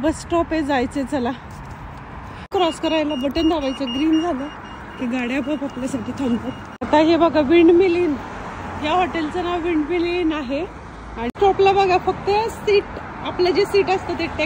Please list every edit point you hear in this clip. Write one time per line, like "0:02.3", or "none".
0:02.5
0:06.7
0:11.3